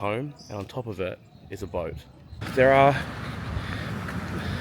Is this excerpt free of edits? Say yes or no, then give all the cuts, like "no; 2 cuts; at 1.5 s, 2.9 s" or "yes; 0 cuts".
no; 1 cut; at 2.5 s